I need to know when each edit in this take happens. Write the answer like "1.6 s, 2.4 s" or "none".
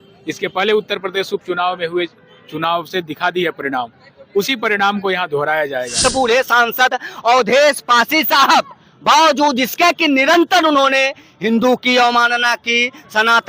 5.9 s